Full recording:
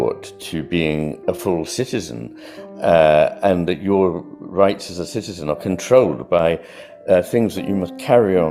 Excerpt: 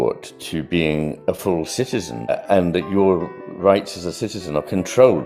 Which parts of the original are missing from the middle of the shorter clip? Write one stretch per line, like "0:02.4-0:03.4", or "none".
0:02.4-0:03.3